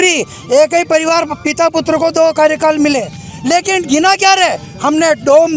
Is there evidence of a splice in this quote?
no; 0 cuts

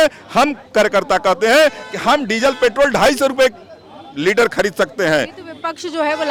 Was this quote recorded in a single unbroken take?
yes; 0 cuts

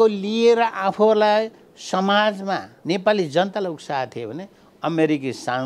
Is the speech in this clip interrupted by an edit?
yes; 1 cut; at 2.7 s

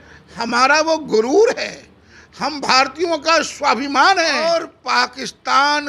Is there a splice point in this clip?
yes; 1 cut; at 4.7 s

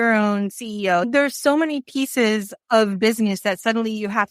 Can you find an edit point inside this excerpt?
yes; 1 cut; at 1.1 s

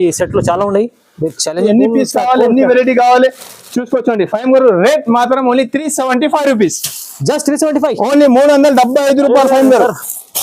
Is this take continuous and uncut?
no; 1 cut; at 1.6 s

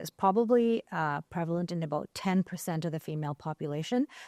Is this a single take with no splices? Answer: yes; 0 cuts

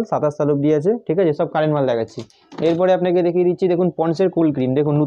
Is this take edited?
no; 0 cuts

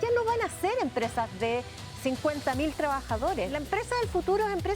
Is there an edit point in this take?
yes; 1 cut; at 3.6 s

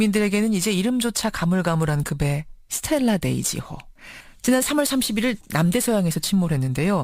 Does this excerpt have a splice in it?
no; 0 cuts

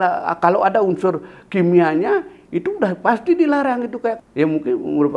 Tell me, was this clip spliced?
yes; 1 cut; at 4.2 s

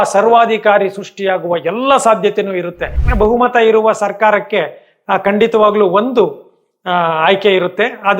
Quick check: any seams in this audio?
yes; 1 cut; at 3.0 s

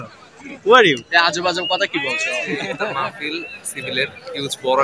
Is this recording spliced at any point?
yes; 1 cut; at 2.7 s

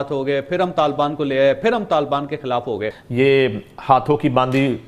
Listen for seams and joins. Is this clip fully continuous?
no; 1 cut; at 3.0 s

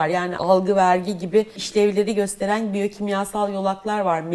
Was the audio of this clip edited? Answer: yes; 1 cut; at 1.6 s

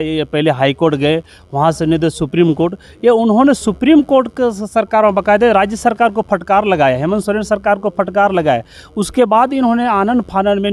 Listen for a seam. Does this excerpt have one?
no; 0 cuts

